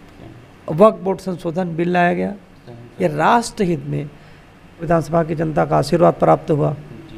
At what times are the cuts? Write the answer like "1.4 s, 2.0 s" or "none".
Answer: 4.8 s